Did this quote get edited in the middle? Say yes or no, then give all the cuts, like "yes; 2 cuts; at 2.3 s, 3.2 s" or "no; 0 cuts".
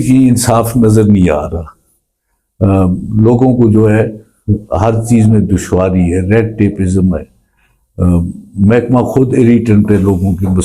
no; 0 cuts